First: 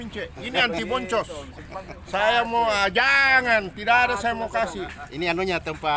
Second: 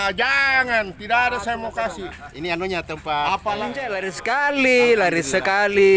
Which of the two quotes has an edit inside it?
second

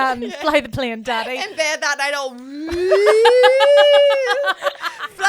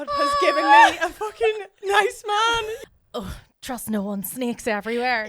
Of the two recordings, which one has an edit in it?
second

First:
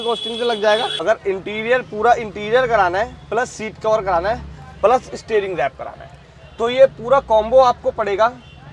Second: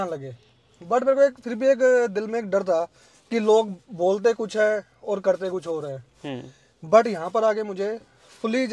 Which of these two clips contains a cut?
first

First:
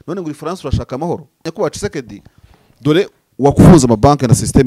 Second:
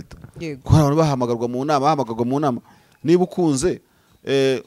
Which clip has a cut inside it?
first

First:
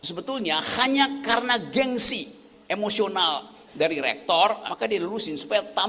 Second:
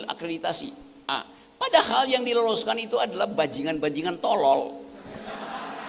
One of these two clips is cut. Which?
first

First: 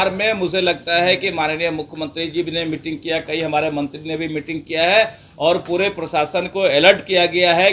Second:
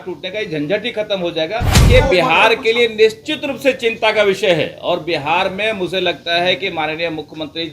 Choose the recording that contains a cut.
second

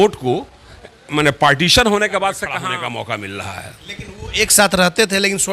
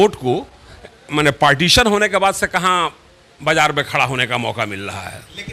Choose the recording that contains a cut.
first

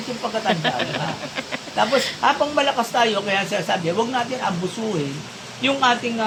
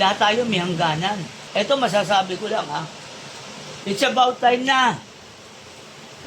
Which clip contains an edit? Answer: second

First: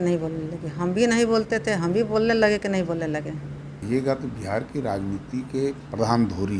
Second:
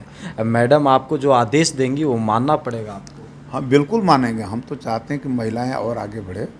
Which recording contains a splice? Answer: first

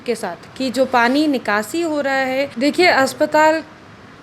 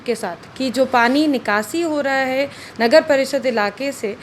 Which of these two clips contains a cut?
first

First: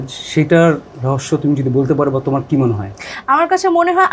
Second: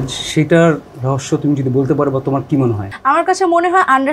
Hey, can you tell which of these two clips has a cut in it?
second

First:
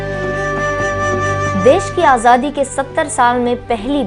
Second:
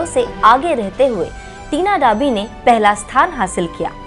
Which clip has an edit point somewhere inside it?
first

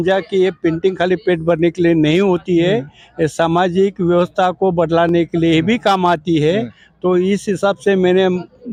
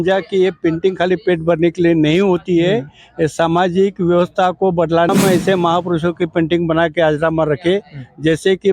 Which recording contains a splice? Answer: second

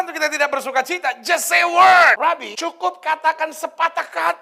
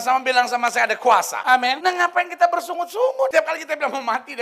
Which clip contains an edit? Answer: second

